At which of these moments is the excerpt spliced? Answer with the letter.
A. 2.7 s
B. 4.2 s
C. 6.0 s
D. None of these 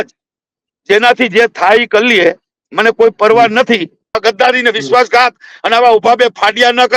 B